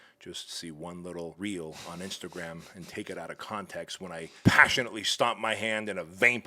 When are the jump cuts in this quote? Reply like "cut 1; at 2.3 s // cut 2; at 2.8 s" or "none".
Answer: cut 1; at 1.3 s // cut 2; at 4.3 s